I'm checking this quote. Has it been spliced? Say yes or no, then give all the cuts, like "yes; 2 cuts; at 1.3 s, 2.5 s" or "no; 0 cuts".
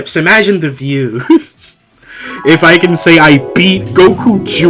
no; 0 cuts